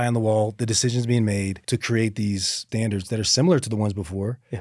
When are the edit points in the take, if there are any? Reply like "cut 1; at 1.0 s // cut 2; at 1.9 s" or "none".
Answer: none